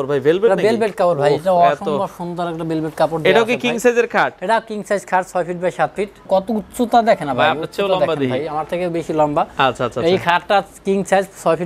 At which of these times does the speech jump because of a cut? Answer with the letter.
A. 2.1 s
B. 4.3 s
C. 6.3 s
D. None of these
C